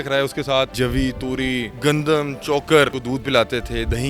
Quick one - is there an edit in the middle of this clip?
yes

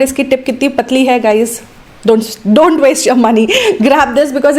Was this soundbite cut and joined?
no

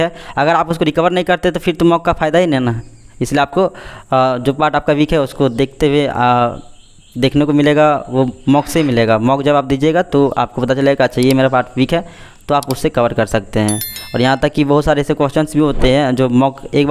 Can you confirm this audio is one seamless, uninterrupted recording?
yes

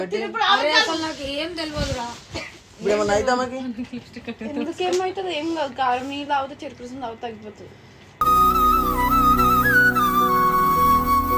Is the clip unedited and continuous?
yes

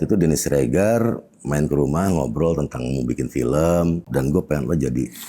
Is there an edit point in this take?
yes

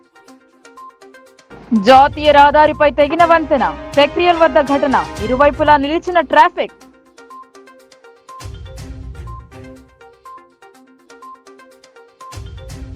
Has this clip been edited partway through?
no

